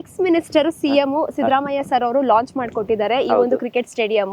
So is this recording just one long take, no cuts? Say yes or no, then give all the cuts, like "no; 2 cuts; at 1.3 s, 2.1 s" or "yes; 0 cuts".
yes; 0 cuts